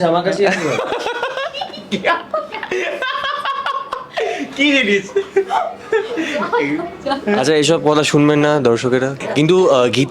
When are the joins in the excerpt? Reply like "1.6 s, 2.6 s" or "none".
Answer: none